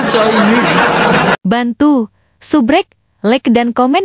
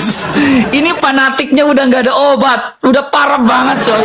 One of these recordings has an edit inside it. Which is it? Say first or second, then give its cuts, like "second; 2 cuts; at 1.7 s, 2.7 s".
first; 1 cut; at 1.4 s